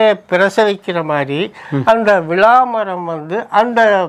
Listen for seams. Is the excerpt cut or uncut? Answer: uncut